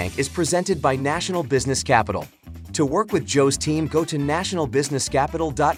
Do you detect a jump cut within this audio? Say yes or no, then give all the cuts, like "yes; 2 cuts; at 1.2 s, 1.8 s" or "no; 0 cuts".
no; 0 cuts